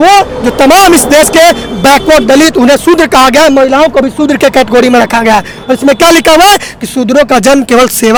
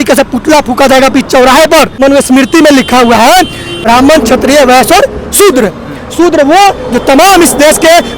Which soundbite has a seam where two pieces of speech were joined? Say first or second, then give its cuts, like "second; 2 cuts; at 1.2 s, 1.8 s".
second; 2 cuts; at 1.9 s, 3.7 s